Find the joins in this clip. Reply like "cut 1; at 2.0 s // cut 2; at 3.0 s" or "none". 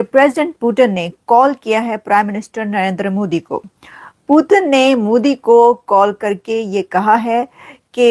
none